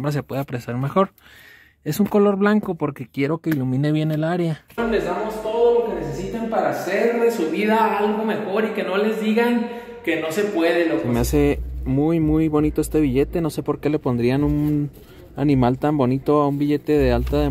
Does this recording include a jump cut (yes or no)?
yes